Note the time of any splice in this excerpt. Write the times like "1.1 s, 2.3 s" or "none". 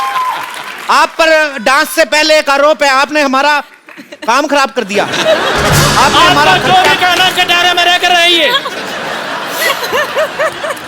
none